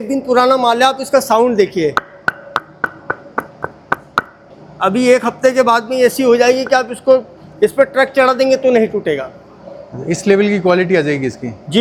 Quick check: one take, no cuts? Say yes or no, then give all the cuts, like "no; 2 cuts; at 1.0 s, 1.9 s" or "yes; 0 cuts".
yes; 0 cuts